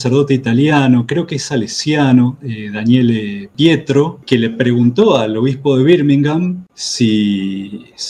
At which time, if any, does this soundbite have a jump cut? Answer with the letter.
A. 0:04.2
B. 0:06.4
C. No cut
A